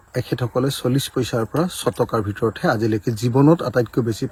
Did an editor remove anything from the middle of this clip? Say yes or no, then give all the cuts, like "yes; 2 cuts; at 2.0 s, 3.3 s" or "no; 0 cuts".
no; 0 cuts